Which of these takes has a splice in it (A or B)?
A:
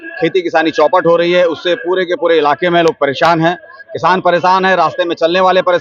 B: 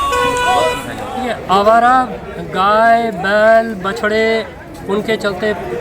B